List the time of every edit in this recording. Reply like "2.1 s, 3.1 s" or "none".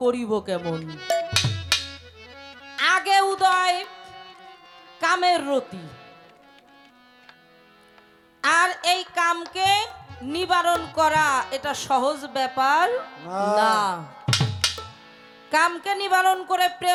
none